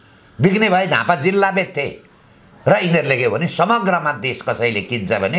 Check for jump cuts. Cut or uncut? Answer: uncut